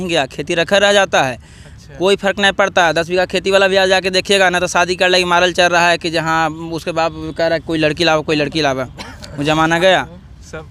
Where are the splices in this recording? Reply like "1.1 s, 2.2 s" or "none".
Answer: none